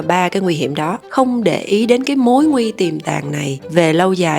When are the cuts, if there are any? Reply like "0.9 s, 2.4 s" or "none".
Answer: 1.0 s